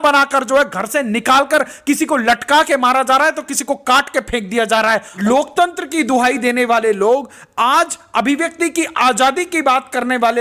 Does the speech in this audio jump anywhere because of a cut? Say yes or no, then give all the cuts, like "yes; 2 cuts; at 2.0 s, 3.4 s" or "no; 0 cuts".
yes; 1 cut; at 5.1 s